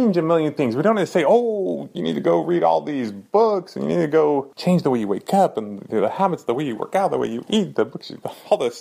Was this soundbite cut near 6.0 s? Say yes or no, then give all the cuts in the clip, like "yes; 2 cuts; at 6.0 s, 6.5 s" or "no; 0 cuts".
no; 2 cuts; at 1.8 s, 4.5 s